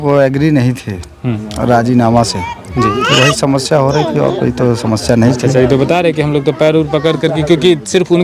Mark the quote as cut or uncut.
uncut